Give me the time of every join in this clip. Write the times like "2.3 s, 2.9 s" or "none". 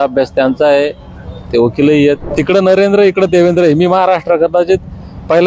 2.3 s